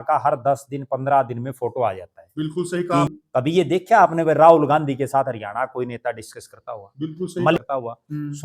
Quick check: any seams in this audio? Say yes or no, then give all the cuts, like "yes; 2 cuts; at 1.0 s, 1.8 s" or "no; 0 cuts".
yes; 2 cuts; at 3.1 s, 7.6 s